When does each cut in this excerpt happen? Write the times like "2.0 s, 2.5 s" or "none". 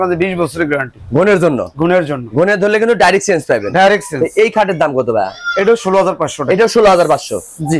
none